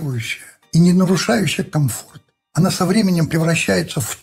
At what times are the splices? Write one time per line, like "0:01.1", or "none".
none